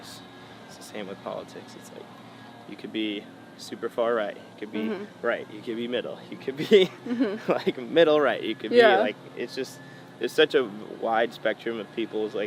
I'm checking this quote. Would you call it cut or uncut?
uncut